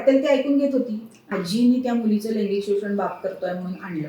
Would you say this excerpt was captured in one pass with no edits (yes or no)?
no